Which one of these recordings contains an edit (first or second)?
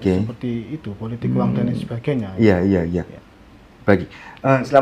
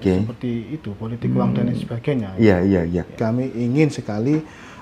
second